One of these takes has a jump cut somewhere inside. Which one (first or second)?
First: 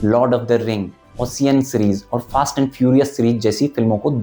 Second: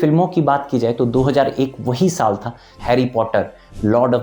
second